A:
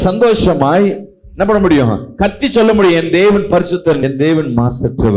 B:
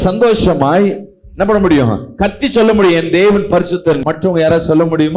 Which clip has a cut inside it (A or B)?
A